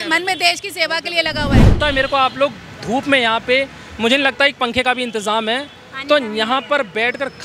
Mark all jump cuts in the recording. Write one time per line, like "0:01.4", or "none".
0:01.7